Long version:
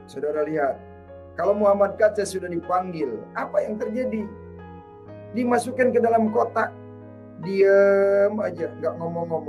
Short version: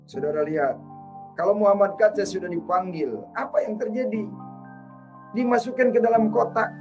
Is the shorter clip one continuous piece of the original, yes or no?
yes